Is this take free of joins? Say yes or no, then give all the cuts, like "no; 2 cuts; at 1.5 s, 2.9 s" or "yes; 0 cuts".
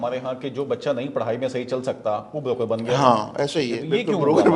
yes; 0 cuts